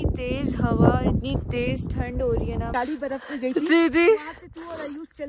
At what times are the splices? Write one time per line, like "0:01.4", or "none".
0:02.8